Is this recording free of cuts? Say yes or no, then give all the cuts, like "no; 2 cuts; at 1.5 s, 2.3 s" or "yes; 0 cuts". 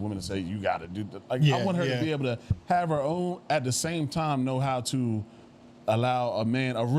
yes; 0 cuts